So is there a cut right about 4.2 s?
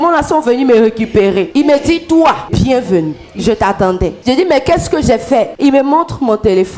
yes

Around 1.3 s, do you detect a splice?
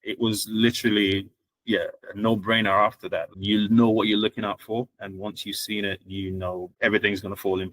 no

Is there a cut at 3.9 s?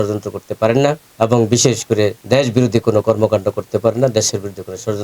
no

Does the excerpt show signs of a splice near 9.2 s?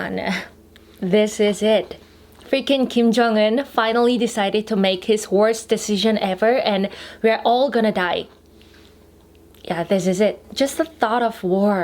no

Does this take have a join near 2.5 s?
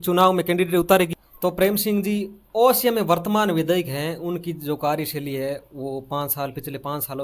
no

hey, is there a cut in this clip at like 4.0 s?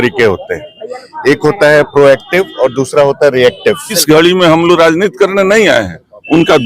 yes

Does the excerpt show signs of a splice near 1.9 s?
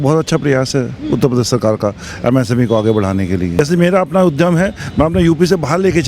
no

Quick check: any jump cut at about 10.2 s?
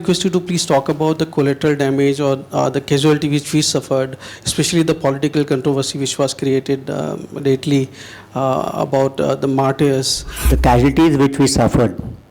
yes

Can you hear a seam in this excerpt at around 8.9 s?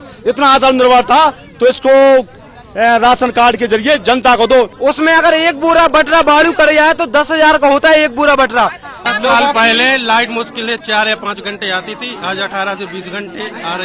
yes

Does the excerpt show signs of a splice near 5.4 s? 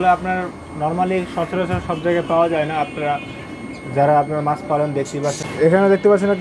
yes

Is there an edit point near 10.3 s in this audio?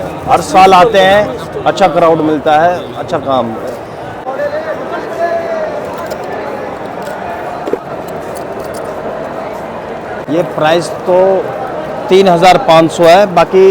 yes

